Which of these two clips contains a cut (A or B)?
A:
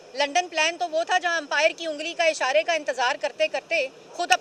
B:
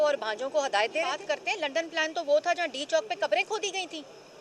B